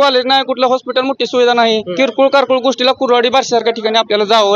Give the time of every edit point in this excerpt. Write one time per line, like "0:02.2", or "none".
0:01.9